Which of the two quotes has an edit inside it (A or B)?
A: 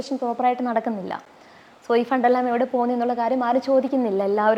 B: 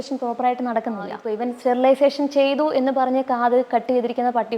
B